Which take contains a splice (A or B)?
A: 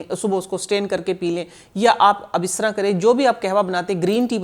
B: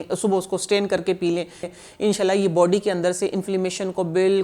B